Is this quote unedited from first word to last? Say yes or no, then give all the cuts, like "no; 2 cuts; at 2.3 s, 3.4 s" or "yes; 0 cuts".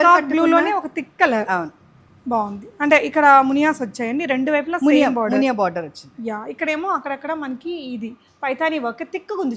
yes; 0 cuts